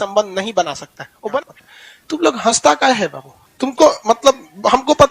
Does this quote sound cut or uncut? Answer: cut